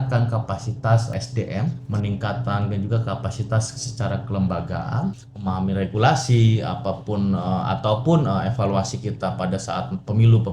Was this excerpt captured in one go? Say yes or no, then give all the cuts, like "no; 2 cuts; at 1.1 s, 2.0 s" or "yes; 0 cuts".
no; 2 cuts; at 1.2 s, 5.3 s